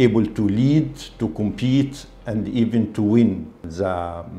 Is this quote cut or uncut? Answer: uncut